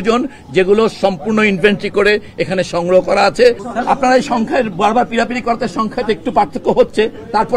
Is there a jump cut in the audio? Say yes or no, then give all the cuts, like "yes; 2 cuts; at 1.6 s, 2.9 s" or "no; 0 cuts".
yes; 1 cut; at 3.6 s